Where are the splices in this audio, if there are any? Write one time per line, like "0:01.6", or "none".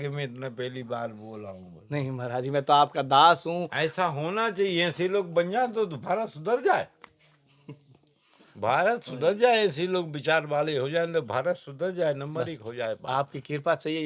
none